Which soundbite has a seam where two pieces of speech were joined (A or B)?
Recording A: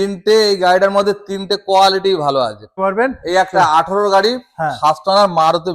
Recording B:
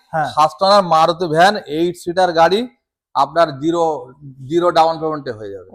A